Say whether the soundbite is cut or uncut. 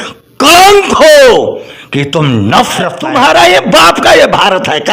cut